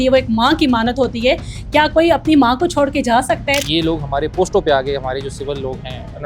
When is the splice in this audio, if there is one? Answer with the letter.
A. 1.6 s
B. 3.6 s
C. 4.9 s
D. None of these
B